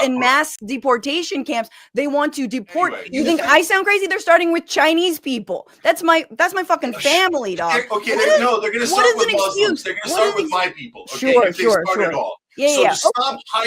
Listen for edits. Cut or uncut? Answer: cut